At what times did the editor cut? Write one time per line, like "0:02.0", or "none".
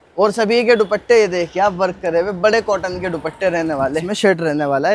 0:04.0

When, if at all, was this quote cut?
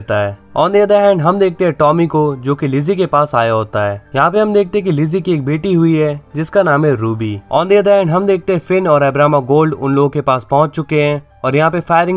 0:04.0

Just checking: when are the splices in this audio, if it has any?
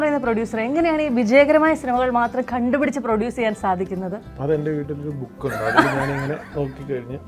none

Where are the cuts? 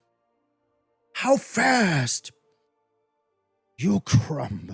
none

